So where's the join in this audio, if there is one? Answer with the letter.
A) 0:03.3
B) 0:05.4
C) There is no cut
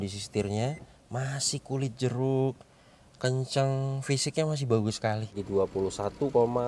B